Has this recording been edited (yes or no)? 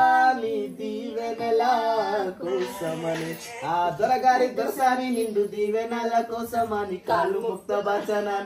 no